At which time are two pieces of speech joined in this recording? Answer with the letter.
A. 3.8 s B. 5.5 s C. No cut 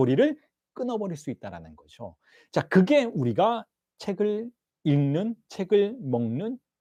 C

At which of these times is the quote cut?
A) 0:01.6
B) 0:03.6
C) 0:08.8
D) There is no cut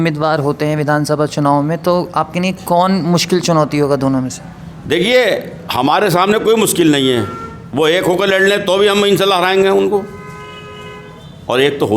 D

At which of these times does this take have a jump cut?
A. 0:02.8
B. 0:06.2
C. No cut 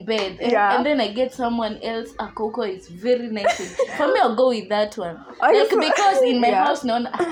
C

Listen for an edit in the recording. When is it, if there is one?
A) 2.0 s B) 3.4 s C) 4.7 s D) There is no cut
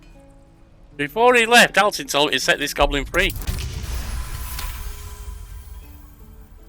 B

